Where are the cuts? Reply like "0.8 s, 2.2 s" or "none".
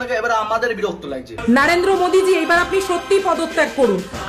1.3 s